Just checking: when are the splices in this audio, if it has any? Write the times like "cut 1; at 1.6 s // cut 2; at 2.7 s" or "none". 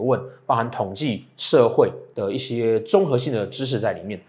cut 1; at 2.0 s